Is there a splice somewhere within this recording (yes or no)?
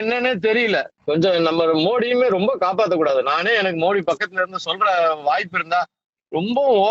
yes